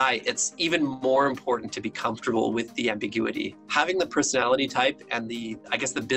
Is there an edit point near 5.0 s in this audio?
no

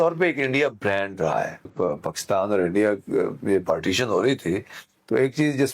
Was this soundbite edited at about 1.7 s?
yes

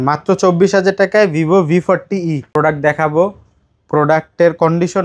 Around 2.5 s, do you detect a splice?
yes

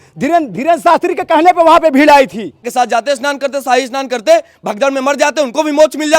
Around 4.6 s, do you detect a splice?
no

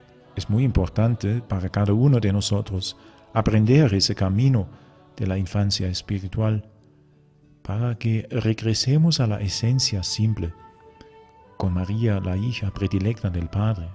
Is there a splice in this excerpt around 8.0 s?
no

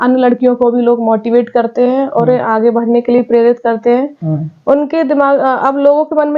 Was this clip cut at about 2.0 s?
no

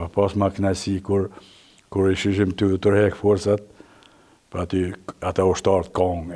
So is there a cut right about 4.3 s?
no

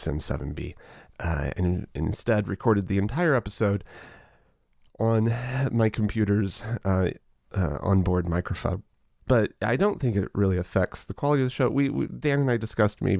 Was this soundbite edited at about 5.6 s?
no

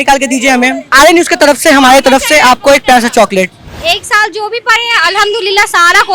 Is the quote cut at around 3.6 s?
yes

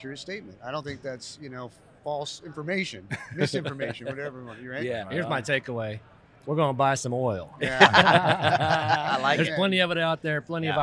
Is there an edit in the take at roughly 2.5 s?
no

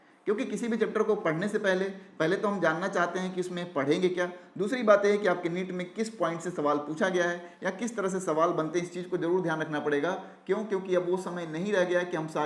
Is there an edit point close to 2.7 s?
no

